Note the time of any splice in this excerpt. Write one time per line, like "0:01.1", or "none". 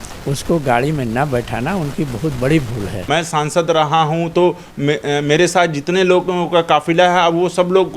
0:03.0

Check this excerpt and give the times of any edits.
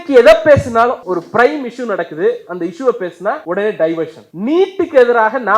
0:01.0
0:03.4
0:04.2

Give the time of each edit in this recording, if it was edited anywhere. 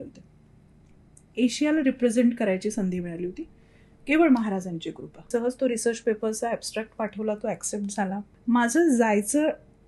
0:05.1
0:08.3

